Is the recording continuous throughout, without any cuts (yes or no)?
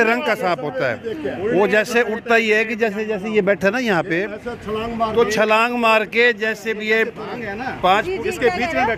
yes